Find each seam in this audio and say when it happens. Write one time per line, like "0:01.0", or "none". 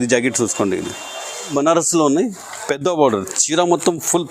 0:01.5